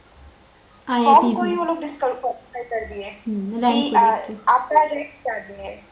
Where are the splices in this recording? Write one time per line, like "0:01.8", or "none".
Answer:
none